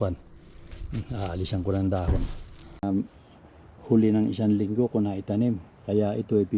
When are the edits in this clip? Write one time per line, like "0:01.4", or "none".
0:02.8